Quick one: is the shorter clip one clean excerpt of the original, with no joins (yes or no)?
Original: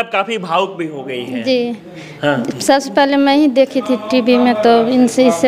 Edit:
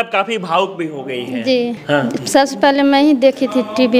no